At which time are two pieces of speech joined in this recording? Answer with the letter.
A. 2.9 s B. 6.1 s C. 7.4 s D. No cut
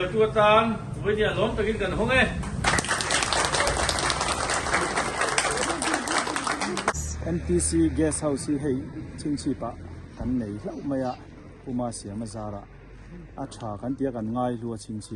C